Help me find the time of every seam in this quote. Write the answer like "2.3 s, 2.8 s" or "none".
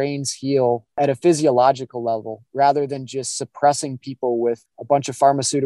1.0 s, 4.7 s